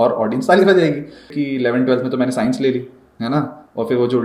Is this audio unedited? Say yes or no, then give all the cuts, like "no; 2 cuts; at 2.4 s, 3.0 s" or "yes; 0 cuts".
no; 1 cut; at 1.3 s